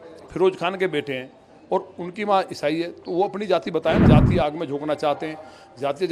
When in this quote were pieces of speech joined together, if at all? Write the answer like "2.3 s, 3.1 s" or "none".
4.0 s